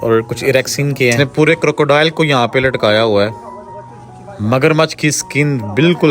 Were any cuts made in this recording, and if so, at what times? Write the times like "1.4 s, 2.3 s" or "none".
1.2 s